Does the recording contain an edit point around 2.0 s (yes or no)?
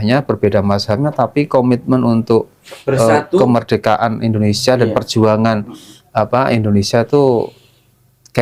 no